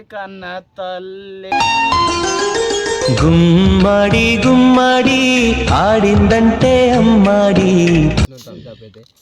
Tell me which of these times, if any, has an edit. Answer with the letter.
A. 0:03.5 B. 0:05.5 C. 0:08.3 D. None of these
C